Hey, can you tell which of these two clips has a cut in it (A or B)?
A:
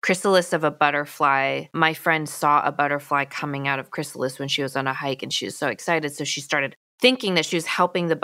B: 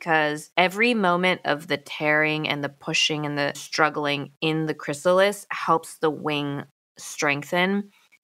B